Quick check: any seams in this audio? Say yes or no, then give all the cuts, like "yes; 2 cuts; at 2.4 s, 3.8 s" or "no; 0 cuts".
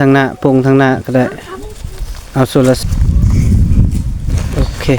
yes; 1 cut; at 2.8 s